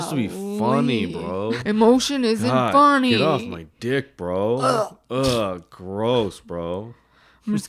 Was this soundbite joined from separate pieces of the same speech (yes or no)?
yes